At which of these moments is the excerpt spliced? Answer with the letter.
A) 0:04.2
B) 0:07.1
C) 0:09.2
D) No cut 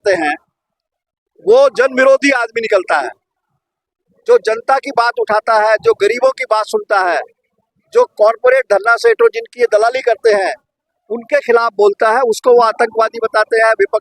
D